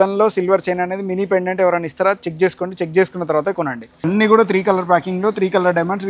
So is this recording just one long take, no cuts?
no; 1 cut; at 4.0 s

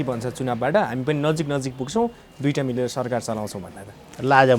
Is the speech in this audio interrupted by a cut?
no; 0 cuts

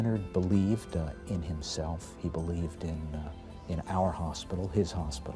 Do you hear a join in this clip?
no; 0 cuts

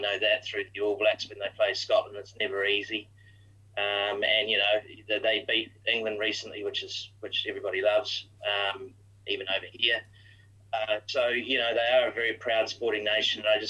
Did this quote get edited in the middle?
no; 0 cuts

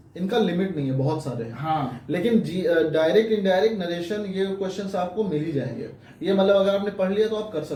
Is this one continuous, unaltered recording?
yes; 0 cuts

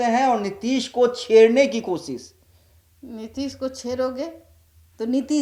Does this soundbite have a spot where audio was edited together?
no; 0 cuts

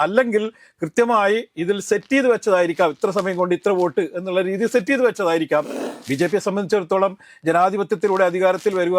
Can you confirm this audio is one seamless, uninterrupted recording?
no; 1 cut; at 5.8 s

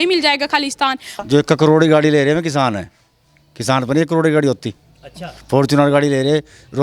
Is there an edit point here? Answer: yes; 1 cut; at 1.2 s

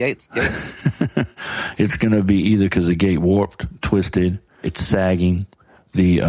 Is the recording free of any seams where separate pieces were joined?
no; 1 cut; at 4.7 s

